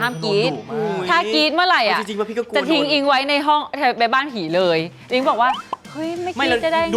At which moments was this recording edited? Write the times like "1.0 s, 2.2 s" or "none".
none